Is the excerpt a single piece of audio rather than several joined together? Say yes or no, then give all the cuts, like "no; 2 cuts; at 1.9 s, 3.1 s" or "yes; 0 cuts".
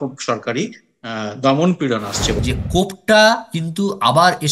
no; 1 cut; at 2.4 s